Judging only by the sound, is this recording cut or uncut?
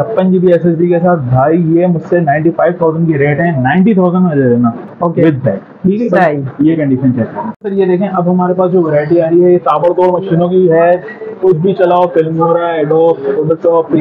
cut